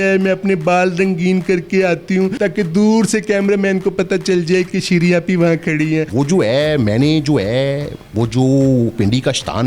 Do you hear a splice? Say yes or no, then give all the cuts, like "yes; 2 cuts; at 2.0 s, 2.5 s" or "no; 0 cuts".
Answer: yes; 2 cuts; at 2.3 s, 6.1 s